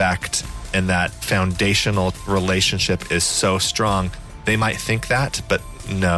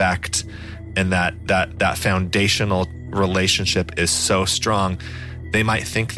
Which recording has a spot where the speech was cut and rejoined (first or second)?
first